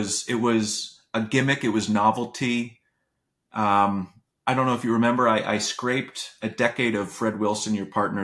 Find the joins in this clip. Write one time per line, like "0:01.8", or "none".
none